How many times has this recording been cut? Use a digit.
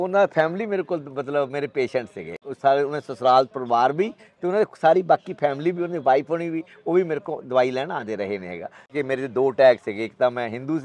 2